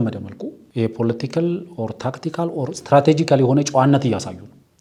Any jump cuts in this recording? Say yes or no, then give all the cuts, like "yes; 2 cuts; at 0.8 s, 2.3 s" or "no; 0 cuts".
no; 0 cuts